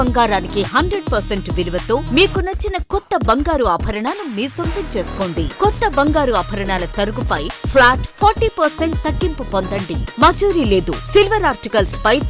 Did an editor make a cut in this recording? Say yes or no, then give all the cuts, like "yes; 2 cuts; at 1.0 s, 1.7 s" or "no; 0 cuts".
no; 0 cuts